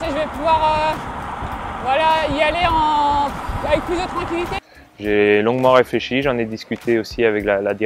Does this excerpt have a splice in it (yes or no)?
yes